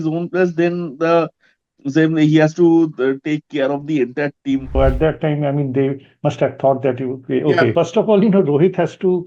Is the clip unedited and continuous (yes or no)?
no